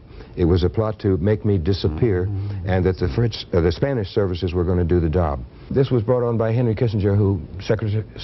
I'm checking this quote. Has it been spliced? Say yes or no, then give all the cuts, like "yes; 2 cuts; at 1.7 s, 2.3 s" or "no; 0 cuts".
yes; 1 cut; at 5.7 s